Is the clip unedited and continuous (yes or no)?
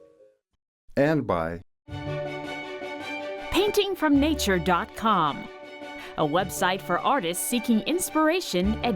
no